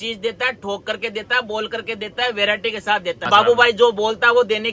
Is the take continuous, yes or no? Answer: no